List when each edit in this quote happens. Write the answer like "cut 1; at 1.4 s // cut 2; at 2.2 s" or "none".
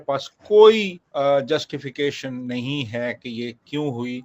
cut 1; at 1.0 s

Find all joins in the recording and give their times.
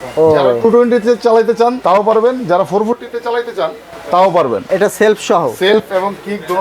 cut 1; at 4.6 s

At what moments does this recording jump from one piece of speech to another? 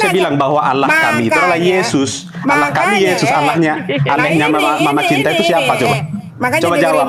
none

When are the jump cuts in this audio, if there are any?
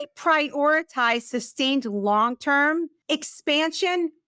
cut 1; at 3.0 s

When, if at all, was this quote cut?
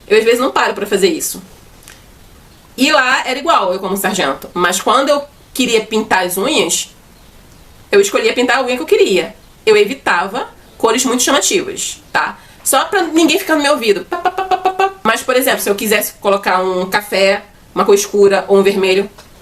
cut 1; at 15.0 s

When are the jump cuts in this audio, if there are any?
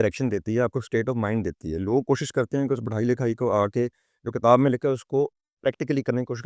none

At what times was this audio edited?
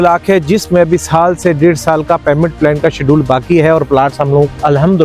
none

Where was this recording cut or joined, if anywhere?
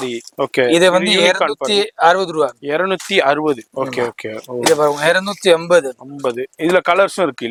none

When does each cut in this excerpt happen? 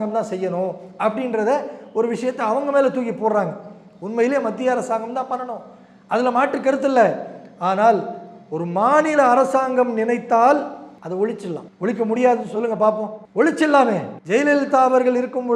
cut 1; at 10.9 s // cut 2; at 11.7 s // cut 3; at 13.2 s // cut 4; at 14.1 s

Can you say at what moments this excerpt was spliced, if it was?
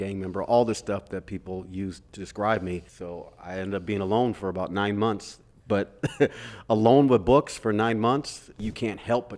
cut 1; at 2.2 s // cut 2; at 2.9 s // cut 3; at 8.6 s

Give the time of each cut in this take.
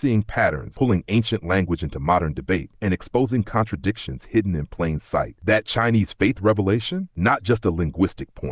none

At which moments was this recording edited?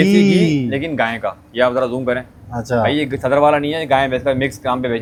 none

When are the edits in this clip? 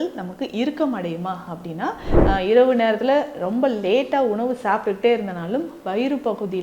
cut 1; at 2.1 s

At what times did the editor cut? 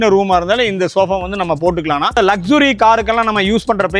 cut 1; at 2.2 s

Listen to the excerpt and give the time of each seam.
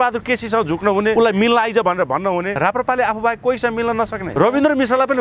cut 1; at 1.1 s // cut 2; at 2.5 s // cut 3; at 4.3 s

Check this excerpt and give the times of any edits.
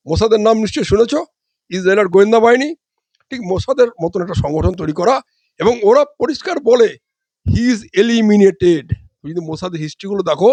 none

